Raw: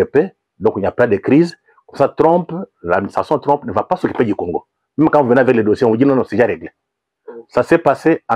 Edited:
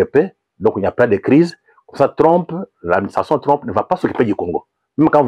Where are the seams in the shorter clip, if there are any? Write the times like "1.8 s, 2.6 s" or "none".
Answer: none